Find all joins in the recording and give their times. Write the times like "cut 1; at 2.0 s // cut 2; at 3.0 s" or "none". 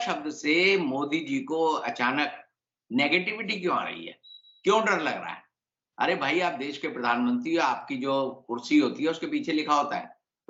none